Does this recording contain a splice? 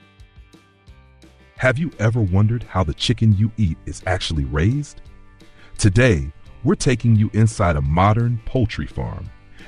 yes; 1 cut; at 1.1 s

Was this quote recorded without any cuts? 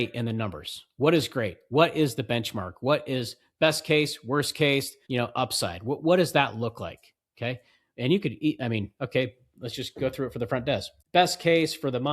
no; 2 cuts; at 5.0 s, 10.9 s

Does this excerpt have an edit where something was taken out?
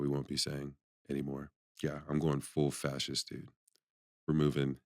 yes; 1 cut; at 1.6 s

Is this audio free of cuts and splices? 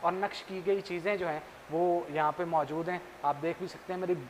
yes; 0 cuts

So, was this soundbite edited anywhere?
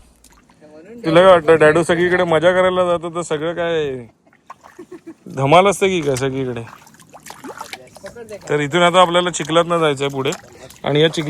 no; 0 cuts

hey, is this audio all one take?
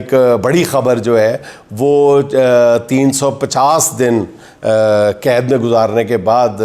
yes; 0 cuts

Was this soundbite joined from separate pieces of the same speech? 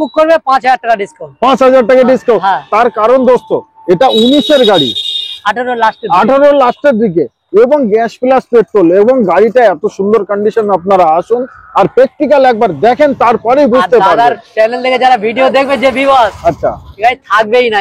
no; 0 cuts

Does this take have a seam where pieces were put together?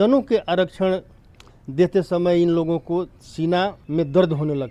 yes; 1 cut; at 3.8 s

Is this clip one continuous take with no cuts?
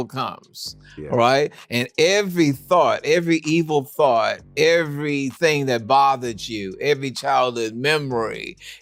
yes; 0 cuts

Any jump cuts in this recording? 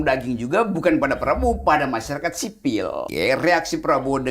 yes; 1 cut; at 3.1 s

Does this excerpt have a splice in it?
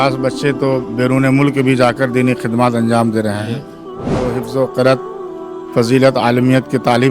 yes; 1 cut; at 4.3 s

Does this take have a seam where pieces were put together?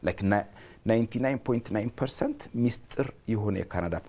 no; 0 cuts

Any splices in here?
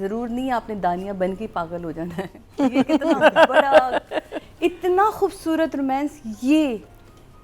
no; 0 cuts

